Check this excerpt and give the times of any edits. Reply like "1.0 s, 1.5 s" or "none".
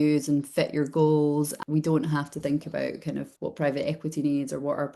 1.6 s